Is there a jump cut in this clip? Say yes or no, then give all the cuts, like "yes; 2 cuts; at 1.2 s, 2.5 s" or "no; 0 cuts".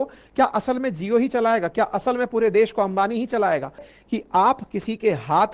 yes; 1 cut; at 3.9 s